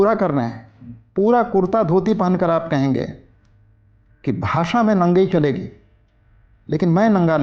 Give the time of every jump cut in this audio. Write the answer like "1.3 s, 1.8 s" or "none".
none